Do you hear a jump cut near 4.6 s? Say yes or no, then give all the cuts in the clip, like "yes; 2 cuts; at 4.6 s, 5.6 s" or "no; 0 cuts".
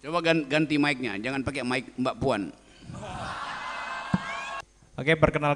yes; 1 cut; at 4.6 s